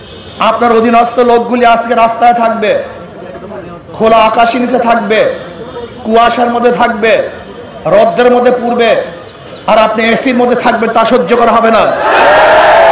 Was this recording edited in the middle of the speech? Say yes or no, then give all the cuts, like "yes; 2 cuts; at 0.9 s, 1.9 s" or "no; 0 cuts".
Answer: no; 0 cuts